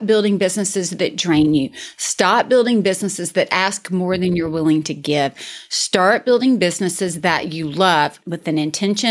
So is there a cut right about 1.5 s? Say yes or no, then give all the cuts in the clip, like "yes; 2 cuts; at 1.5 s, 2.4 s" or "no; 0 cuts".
no; 1 cut; at 8.2 s